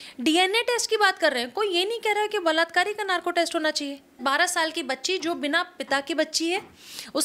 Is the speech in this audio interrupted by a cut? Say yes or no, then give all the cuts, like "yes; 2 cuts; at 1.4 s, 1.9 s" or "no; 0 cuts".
yes; 1 cut; at 4.2 s